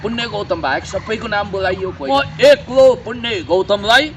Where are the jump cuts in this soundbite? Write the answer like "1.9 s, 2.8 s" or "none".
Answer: 2.1 s